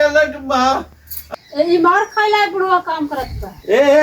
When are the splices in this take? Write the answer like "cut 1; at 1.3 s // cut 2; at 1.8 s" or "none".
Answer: cut 1; at 1.2 s